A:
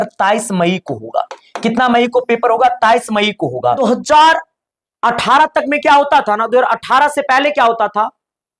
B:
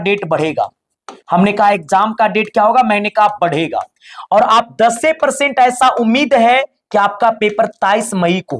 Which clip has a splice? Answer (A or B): A